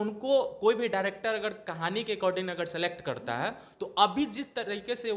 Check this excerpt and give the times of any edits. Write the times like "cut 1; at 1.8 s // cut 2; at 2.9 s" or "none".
none